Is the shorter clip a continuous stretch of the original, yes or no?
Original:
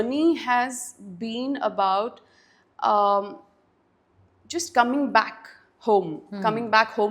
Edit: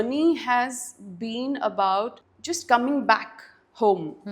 no